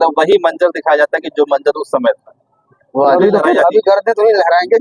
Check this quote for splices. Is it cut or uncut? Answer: cut